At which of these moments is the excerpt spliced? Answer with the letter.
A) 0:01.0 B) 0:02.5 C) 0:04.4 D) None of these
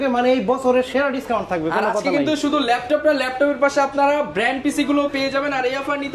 D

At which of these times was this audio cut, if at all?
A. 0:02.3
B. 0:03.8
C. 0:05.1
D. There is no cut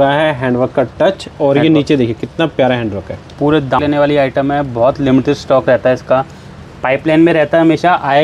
B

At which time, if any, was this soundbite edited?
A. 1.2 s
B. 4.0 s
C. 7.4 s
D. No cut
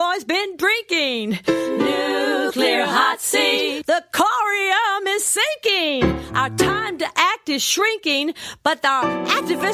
D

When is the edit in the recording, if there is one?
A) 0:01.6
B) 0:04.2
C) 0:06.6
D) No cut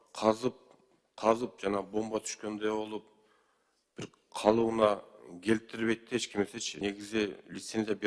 C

